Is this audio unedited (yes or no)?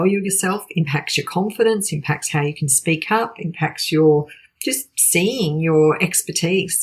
yes